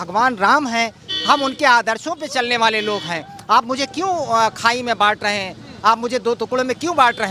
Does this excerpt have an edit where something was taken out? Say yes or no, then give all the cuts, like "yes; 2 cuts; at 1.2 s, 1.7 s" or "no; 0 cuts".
no; 0 cuts